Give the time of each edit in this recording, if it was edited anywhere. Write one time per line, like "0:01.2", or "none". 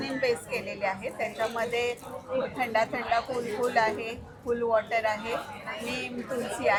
none